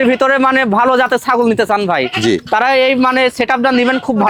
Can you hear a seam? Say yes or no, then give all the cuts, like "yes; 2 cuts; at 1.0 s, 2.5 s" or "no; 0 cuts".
no; 0 cuts